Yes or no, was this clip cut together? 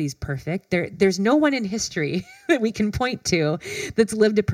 no